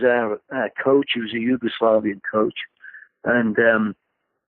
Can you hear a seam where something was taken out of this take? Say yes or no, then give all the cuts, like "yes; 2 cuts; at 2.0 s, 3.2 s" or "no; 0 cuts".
no; 0 cuts